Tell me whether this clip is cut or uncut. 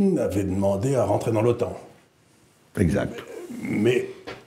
uncut